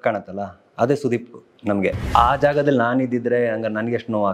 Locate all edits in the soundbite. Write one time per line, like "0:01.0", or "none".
0:02.0